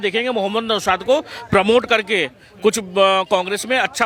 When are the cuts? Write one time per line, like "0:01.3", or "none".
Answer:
none